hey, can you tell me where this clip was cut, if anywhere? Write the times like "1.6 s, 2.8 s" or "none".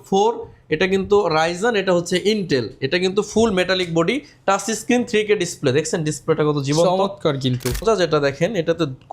7.8 s